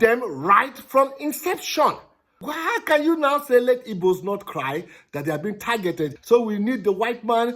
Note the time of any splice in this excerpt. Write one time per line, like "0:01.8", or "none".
0:02.4
0:06.2